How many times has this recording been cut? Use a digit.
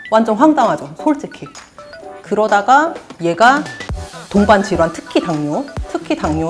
1